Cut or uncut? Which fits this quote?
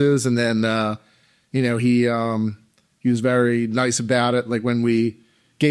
uncut